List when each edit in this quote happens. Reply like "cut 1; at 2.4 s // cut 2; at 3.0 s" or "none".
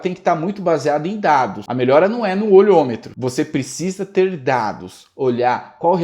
cut 1; at 1.6 s // cut 2; at 3.1 s